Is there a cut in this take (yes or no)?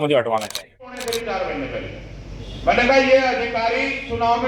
yes